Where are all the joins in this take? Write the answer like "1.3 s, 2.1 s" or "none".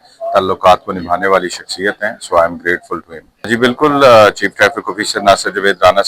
3.5 s